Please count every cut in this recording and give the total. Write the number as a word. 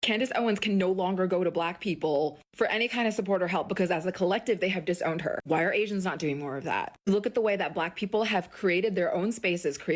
one